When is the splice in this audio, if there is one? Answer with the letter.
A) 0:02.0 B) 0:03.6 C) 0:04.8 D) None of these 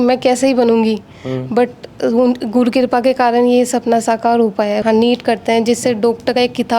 C